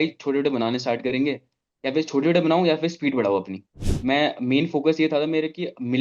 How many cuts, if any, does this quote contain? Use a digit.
1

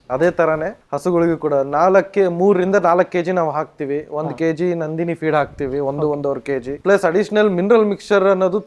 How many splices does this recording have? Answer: 1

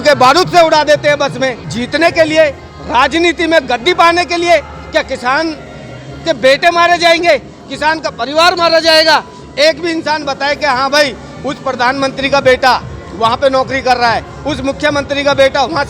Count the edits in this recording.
1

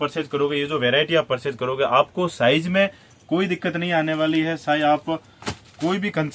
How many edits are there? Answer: 0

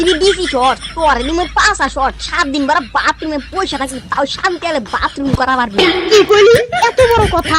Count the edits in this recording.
1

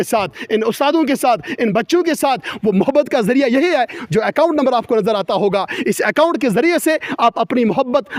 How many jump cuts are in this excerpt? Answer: 0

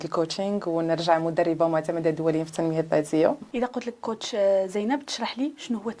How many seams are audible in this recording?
1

